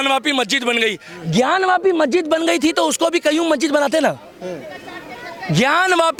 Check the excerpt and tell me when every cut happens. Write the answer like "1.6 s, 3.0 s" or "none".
none